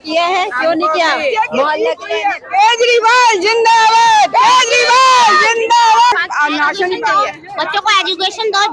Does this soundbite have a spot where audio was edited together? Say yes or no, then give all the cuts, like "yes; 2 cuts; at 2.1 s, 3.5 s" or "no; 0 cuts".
yes; 1 cut; at 6.1 s